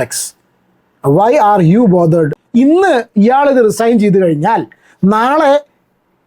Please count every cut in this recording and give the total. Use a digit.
1